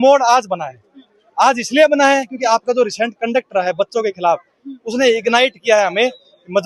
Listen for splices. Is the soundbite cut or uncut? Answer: uncut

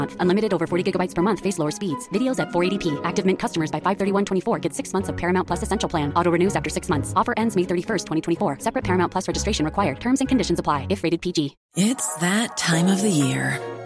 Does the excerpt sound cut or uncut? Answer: cut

